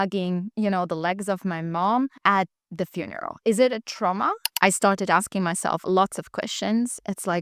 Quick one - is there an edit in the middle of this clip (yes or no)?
yes